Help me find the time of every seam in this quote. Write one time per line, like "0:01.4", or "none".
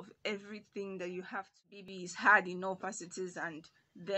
0:01.8